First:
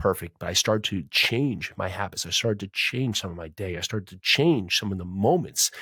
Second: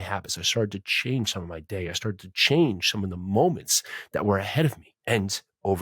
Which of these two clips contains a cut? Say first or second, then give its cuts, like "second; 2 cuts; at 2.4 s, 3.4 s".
second; 1 cut; at 4.9 s